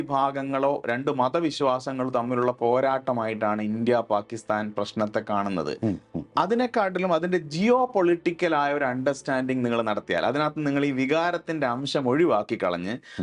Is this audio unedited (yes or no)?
yes